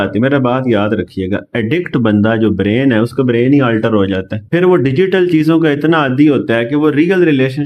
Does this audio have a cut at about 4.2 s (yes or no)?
no